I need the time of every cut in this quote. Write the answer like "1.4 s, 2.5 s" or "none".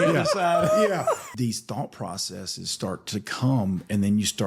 1.3 s